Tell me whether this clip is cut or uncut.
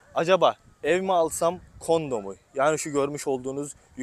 uncut